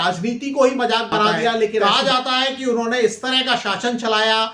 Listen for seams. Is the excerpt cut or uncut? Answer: cut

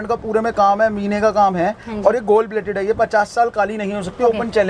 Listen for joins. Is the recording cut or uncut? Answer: uncut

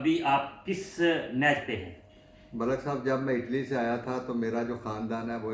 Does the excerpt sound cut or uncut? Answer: uncut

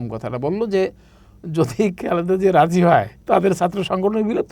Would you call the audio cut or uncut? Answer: cut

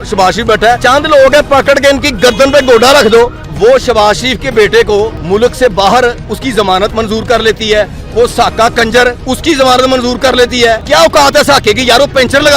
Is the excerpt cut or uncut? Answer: cut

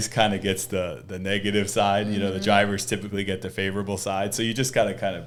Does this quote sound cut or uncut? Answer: uncut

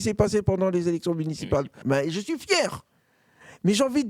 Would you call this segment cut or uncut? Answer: cut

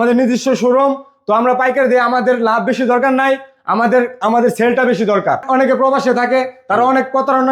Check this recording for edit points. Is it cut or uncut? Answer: cut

